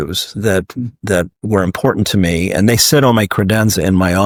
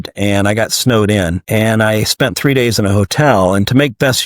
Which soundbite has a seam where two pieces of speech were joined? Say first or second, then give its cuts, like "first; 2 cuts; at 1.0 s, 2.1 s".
second; 1 cut; at 1.4 s